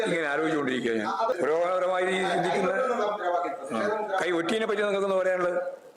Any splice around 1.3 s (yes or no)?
yes